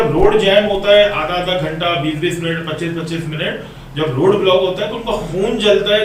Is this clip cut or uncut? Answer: uncut